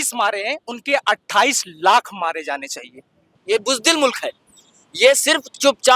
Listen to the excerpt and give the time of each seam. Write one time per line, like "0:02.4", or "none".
0:03.3